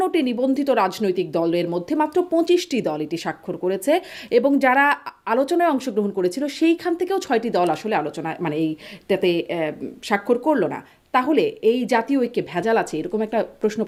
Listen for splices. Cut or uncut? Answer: uncut